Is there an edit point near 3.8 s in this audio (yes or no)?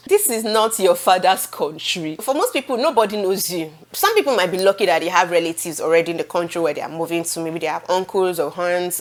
no